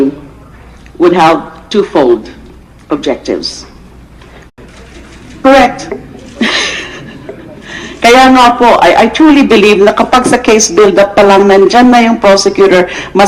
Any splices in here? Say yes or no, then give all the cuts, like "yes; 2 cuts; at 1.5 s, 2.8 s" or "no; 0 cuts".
no; 0 cuts